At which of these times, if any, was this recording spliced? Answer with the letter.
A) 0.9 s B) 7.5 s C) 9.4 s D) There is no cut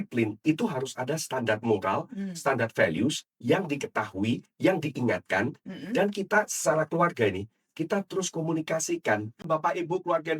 C